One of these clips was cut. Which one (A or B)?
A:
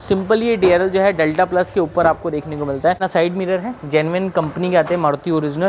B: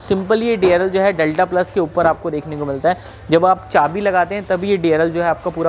A